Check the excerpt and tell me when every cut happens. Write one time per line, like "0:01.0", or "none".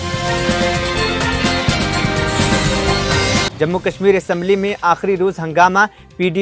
none